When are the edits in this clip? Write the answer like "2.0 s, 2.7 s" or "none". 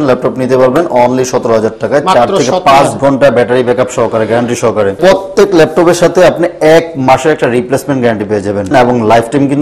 5.0 s, 8.7 s